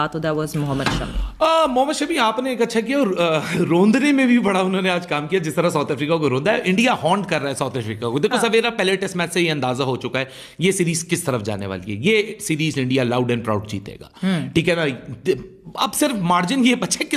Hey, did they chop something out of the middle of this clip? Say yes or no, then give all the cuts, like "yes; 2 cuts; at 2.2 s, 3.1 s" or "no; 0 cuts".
no; 0 cuts